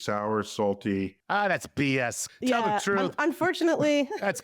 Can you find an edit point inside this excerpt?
yes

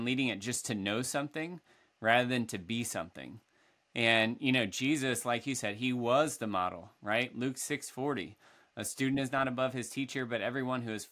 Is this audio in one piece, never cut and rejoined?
yes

